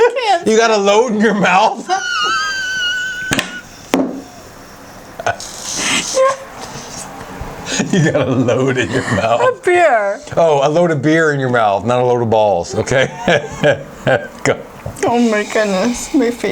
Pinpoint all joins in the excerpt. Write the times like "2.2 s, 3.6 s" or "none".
none